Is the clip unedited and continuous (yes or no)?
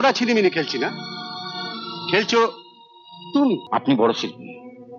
no